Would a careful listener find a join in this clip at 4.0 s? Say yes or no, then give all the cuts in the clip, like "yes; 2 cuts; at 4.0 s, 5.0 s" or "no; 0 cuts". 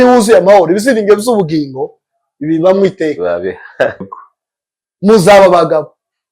yes; 1 cut; at 4.0 s